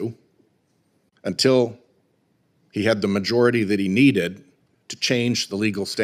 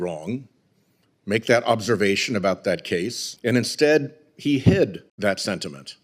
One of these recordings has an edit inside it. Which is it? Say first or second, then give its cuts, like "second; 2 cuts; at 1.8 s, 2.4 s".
second; 2 cuts; at 3.2 s, 5.1 s